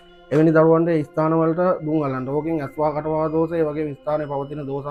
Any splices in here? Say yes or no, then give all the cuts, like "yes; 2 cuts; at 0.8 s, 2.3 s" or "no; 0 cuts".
no; 0 cuts